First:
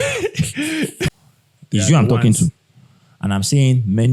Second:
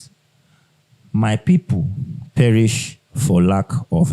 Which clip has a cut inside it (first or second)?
first